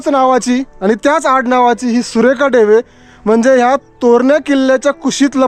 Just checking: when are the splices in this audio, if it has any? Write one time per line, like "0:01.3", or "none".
none